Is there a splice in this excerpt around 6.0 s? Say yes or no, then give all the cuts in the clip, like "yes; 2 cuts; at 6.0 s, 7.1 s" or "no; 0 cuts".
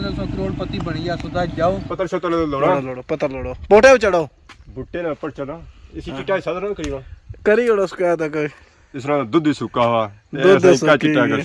no; 1 cut; at 1.9 s